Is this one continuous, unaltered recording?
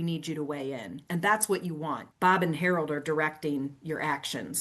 no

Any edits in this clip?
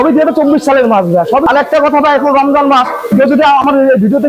yes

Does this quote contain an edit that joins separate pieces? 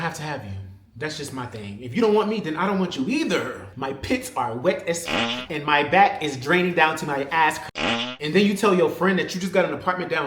yes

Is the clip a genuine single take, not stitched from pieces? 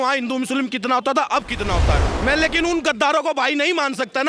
no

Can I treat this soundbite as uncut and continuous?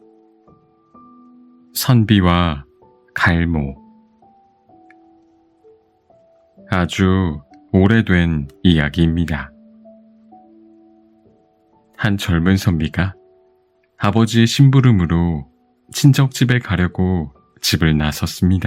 no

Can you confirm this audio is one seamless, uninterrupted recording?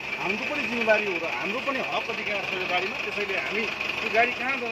yes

